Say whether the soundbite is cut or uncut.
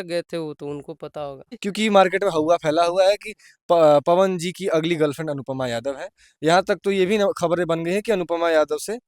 cut